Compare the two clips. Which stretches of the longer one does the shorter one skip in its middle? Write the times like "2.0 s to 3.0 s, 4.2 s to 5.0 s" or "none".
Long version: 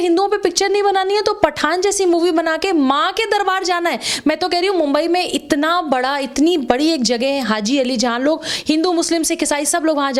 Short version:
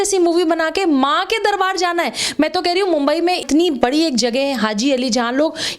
5.3 s to 6.3 s